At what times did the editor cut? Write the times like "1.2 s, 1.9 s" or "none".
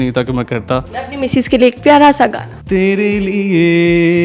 1.0 s, 2.5 s

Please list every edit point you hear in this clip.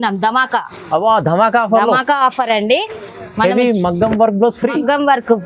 none

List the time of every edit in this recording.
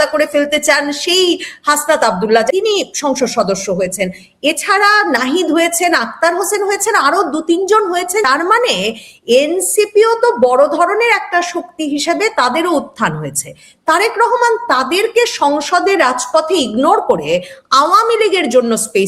2.5 s, 8.2 s

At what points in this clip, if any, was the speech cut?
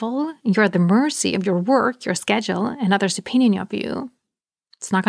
none

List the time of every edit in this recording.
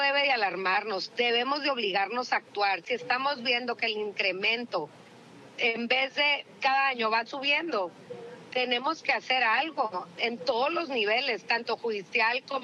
none

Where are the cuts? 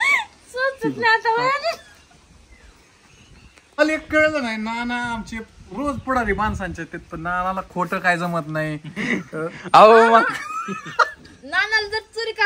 3.8 s

